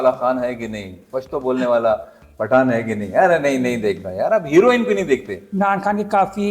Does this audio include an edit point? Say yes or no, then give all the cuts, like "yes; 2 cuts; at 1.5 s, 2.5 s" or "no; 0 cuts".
yes; 1 cut; at 5.4 s